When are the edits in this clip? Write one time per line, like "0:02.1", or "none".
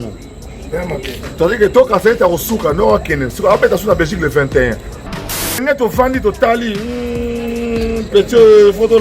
0:05.2